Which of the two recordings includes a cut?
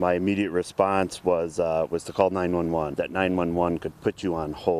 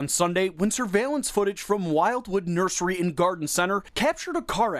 first; 1 cut; at 2.9 s

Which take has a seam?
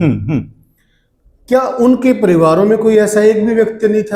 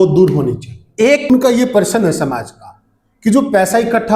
second; 1 cut; at 1.3 s

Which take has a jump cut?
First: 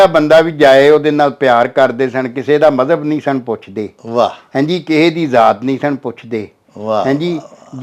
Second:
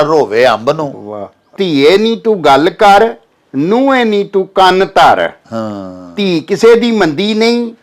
second; 1 cut; at 1.5 s

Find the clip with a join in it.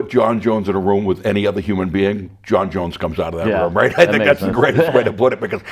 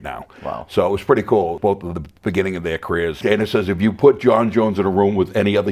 second; 2 cuts; at 1.6 s, 3.2 s

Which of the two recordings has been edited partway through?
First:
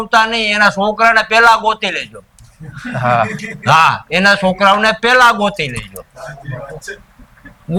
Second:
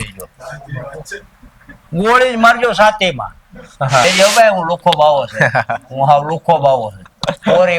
second; 1 cut; at 4.0 s

